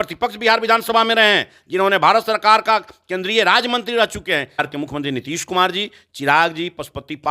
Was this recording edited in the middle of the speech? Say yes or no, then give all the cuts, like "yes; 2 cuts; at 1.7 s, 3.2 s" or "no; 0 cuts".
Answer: yes; 1 cut; at 4.7 s